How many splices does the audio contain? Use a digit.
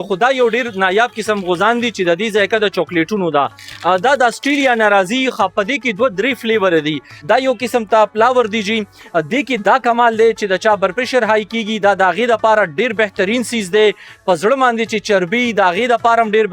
1